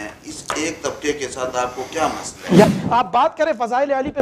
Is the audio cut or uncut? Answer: cut